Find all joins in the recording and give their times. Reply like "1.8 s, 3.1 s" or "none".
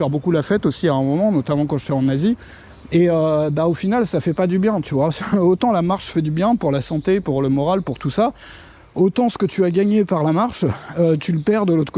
none